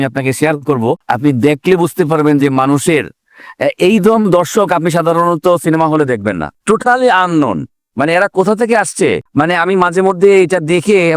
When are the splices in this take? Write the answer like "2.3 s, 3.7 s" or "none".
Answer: none